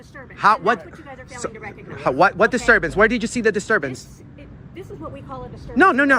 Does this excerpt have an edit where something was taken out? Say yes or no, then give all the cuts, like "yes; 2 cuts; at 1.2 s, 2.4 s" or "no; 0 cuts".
no; 0 cuts